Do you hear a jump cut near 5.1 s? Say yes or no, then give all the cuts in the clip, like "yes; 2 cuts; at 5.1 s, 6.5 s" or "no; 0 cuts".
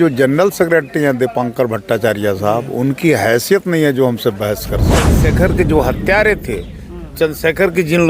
yes; 1 cut; at 5.1 s